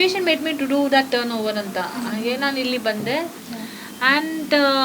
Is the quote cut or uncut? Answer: cut